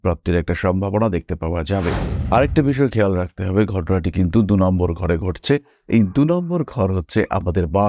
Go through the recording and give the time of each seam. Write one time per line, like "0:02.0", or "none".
0:02.1